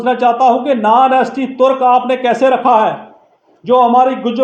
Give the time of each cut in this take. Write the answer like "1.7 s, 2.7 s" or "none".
none